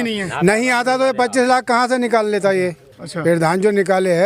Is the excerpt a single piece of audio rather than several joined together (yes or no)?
yes